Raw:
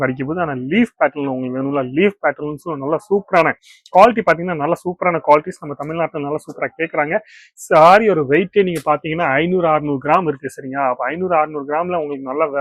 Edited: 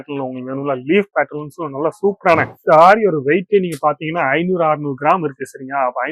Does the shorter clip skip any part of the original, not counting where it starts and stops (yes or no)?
yes